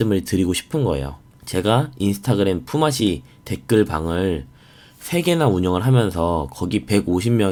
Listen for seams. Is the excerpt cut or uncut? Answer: uncut